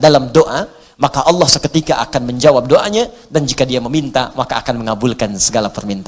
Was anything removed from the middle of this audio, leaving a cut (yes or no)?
no